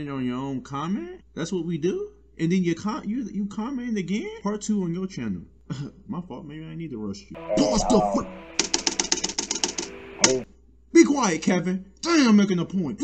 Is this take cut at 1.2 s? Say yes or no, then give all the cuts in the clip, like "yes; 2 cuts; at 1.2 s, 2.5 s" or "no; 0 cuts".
yes; 3 cuts; at 1.2 s, 4.3 s, 7.3 s